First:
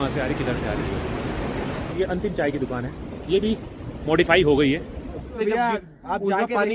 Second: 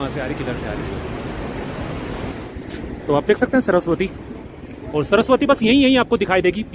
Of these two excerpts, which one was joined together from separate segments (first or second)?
first